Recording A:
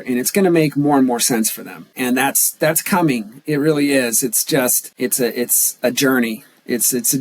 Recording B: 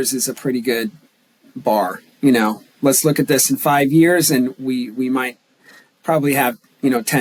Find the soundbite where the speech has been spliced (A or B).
A